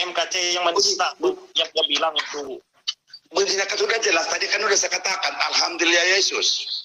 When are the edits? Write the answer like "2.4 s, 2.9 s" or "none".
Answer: none